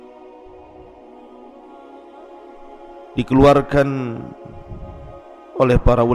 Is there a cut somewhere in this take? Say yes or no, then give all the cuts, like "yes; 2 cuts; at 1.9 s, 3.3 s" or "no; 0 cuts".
yes; 1 cut; at 3.1 s